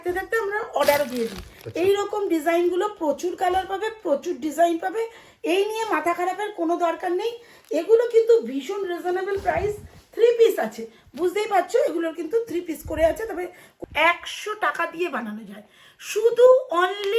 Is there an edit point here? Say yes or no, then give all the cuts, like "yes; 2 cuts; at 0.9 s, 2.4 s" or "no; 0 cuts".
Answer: yes; 1 cut; at 13.7 s